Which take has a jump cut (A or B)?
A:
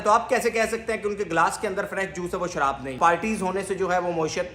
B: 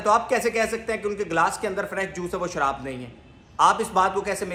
A